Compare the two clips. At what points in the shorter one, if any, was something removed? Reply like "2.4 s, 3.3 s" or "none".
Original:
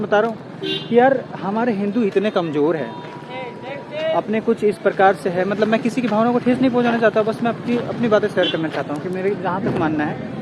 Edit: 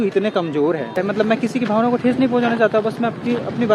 0.9 s